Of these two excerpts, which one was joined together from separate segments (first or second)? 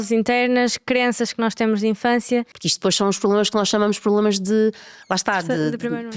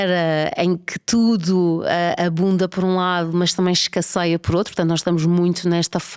first